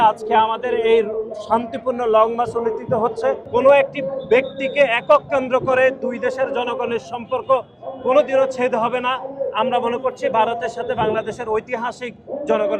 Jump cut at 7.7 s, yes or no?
no